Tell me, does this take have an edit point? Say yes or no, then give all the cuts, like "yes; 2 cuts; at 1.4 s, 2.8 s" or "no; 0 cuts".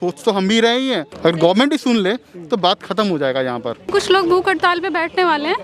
yes; 2 cuts; at 1.1 s, 3.8 s